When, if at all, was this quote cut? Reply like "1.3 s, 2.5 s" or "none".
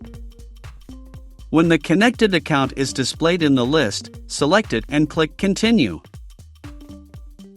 1.0 s, 6.4 s